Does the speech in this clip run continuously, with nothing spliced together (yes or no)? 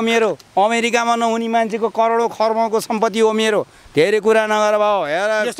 yes